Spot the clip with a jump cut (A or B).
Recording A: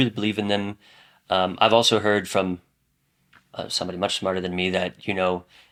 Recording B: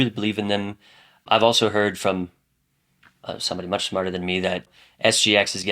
B